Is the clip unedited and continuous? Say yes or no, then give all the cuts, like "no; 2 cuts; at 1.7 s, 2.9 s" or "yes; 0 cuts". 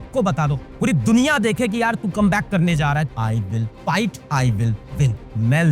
no; 1 cut; at 3.1 s